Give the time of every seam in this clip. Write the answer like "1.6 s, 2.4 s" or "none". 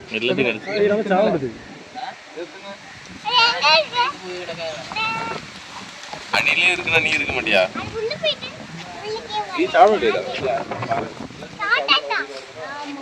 none